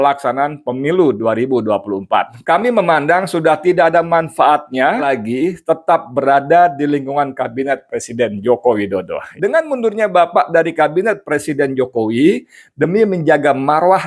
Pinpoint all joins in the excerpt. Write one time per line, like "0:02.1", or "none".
0:02.4
0:05.0
0:09.2